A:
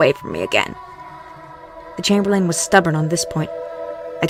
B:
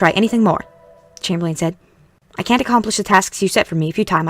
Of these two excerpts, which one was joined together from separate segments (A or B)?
B